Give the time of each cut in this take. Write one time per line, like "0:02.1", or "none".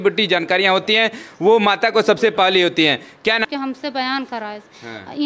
0:03.5